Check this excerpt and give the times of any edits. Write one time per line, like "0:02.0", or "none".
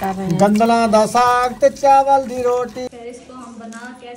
0:02.9